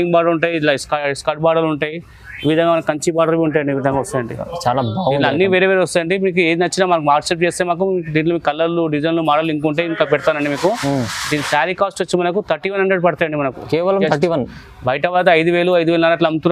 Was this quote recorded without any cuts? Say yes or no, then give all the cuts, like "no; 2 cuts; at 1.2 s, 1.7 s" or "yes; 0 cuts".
yes; 0 cuts